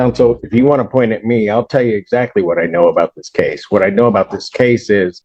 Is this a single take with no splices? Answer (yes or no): yes